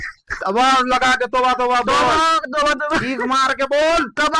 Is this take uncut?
yes; 0 cuts

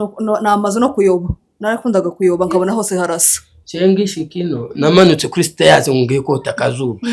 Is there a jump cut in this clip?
no; 0 cuts

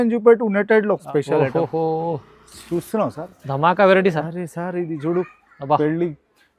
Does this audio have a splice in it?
yes; 1 cut; at 1.0 s

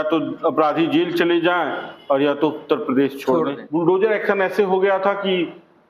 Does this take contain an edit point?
yes; 1 cut; at 3.6 s

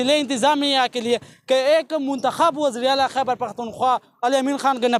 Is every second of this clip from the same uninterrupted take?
yes; 0 cuts

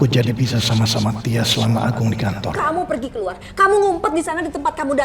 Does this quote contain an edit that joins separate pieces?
yes; 1 cut; at 2.6 s

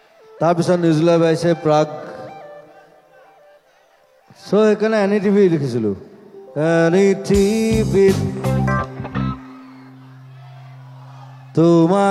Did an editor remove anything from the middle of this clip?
no; 0 cuts

